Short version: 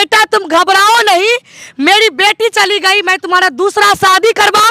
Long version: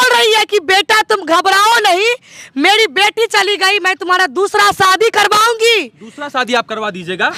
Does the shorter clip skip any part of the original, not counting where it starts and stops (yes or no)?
no